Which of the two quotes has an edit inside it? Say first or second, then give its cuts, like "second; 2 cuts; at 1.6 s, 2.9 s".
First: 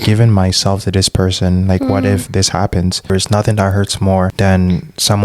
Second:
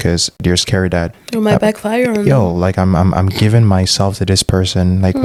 first; 2 cuts; at 3.1 s, 4.3 s